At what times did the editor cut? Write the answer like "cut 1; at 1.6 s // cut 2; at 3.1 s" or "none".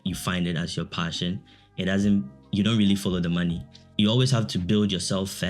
cut 1; at 3.8 s